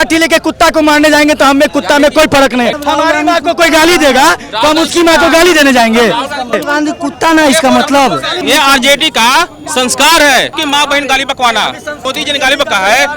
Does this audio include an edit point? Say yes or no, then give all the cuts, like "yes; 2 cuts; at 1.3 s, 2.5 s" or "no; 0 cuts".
yes; 5 cuts; at 2.8 s, 6.6 s, 8.4 s, 10.6 s, 12.0 s